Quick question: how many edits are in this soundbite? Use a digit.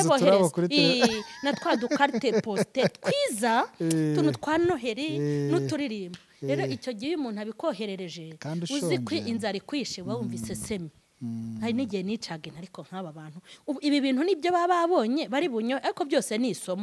0